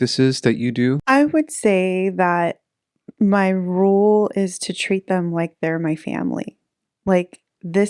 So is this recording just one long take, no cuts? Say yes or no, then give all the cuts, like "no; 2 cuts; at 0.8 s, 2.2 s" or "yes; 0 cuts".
no; 1 cut; at 1.0 s